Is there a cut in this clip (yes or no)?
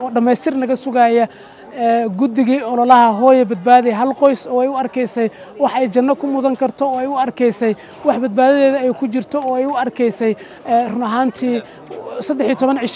no